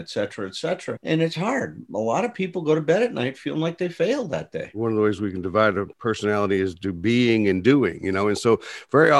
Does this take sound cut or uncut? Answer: cut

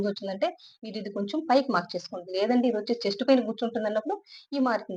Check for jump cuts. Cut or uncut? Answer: uncut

